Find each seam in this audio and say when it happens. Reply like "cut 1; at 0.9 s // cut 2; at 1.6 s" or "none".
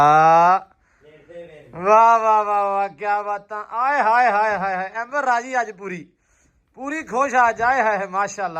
none